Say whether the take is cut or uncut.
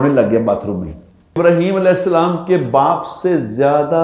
cut